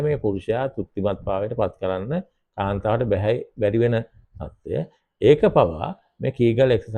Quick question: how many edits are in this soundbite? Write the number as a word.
zero